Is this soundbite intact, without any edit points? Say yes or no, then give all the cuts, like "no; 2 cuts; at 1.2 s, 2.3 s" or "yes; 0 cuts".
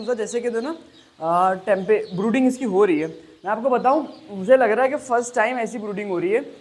yes; 0 cuts